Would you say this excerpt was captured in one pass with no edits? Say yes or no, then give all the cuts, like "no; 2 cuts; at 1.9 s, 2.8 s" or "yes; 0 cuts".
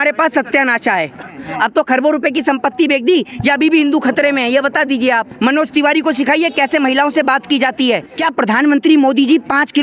no; 3 cuts; at 1.3 s, 5.3 s, 8.2 s